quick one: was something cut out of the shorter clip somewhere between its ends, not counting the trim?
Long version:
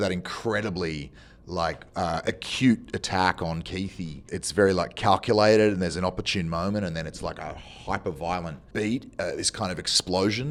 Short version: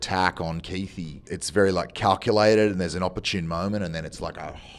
no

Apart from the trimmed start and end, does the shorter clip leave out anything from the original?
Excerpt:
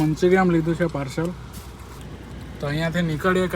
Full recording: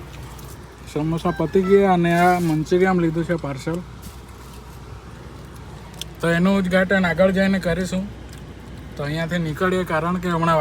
yes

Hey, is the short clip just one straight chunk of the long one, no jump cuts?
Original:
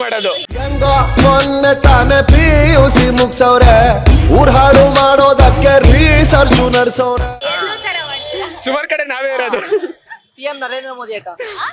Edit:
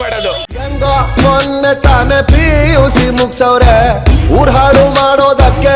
yes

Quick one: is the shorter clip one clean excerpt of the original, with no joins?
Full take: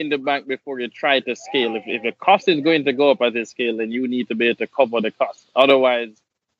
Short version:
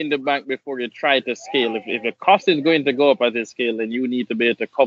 yes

